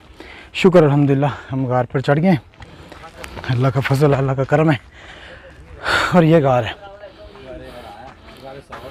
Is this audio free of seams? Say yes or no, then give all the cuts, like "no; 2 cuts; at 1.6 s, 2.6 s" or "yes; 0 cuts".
yes; 0 cuts